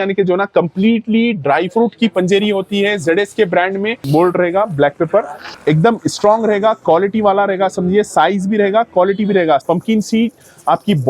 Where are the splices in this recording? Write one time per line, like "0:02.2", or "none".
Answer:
0:04.0
0:09.6